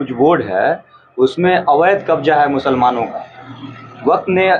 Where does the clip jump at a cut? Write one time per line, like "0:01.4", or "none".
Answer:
none